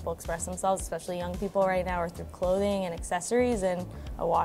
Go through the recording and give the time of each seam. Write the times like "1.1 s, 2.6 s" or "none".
none